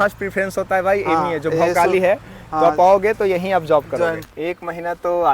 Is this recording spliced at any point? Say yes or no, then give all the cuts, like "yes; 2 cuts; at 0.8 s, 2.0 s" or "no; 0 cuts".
yes; 1 cut; at 4.2 s